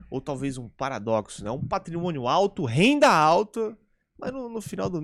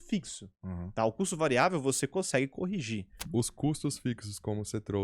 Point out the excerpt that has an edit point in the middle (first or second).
second